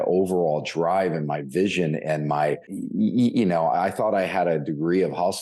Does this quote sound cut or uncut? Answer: cut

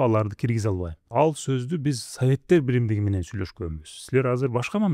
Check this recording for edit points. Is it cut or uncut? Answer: cut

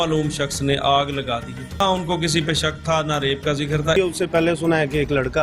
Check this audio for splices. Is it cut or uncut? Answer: cut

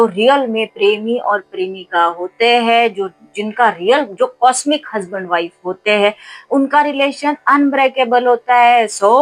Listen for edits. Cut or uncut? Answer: uncut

